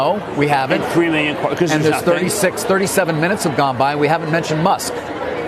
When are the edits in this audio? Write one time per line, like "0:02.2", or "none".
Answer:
none